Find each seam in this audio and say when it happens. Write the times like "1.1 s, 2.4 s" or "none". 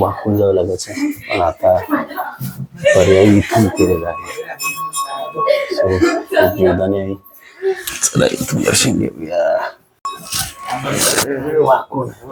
none